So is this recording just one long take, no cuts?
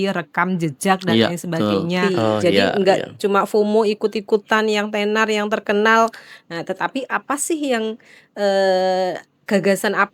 no; 1 cut; at 2.0 s

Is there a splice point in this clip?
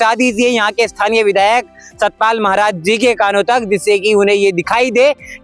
no; 0 cuts

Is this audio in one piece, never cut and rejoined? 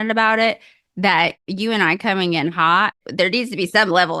no; 1 cut; at 3.0 s

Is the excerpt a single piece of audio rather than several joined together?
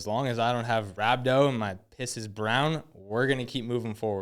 no; 1 cut; at 0.9 s

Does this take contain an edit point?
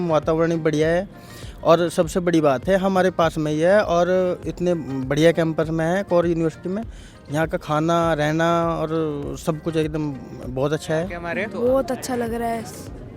yes; 1 cut; at 11.2 s

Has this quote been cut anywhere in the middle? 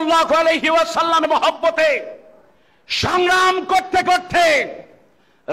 yes; 1 cut; at 1.2 s

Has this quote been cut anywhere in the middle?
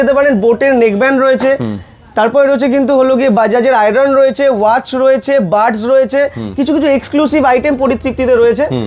no; 0 cuts

